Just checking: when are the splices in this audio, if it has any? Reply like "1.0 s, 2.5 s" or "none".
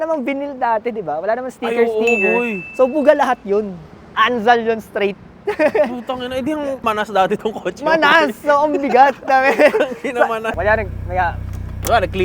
6.8 s, 10.5 s